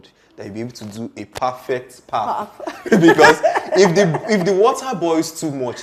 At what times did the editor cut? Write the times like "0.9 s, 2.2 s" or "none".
none